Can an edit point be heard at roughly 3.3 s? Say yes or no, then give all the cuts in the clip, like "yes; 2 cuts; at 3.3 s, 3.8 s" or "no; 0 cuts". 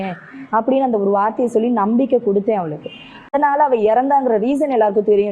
yes; 1 cut; at 3.3 s